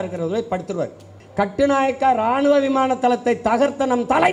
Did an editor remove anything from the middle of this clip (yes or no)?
yes